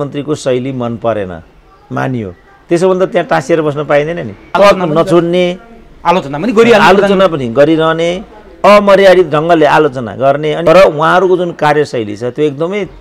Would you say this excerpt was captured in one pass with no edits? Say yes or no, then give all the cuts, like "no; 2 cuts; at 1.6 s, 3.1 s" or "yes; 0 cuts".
no; 2 cuts; at 4.5 s, 10.6 s